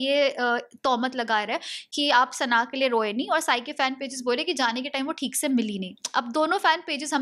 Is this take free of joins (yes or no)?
yes